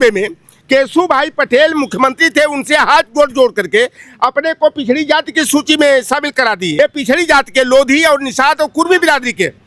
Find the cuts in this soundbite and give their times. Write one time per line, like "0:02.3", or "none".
0:06.7